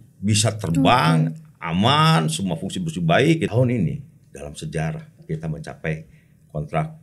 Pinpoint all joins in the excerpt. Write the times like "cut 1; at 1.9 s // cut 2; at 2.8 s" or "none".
cut 1; at 3.5 s